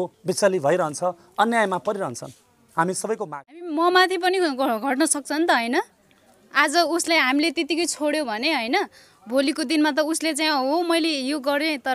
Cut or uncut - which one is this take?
cut